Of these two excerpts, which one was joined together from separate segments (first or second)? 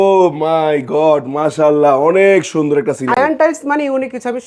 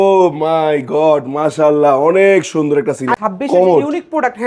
second